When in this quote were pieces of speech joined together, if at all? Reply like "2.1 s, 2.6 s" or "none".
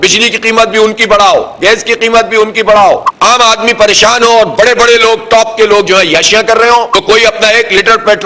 3.1 s, 6.9 s